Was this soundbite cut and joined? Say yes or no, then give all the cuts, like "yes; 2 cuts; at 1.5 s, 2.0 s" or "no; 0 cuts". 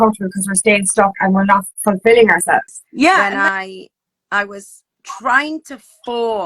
yes; 1 cut; at 3.2 s